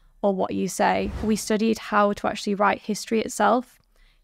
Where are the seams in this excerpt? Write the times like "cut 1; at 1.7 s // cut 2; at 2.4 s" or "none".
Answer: cut 1; at 1.1 s